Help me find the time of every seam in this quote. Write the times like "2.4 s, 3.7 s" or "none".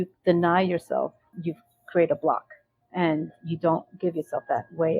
1.3 s